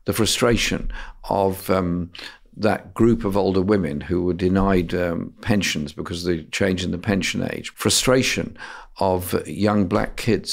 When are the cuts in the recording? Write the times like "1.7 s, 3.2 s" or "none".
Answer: 7.6 s